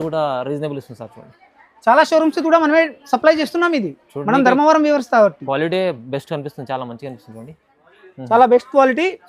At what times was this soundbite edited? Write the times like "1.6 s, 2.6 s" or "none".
1.4 s